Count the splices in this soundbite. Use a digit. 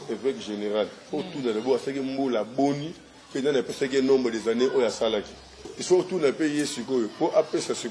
1